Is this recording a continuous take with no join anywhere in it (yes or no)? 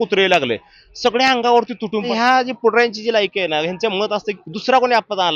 no